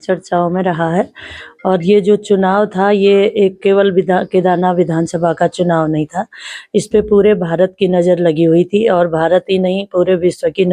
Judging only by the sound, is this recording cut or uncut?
uncut